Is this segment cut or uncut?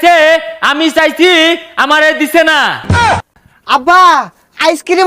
cut